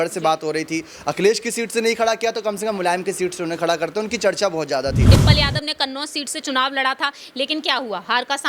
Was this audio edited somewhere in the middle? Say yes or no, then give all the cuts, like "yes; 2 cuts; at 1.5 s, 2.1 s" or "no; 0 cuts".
yes; 1 cut; at 5.1 s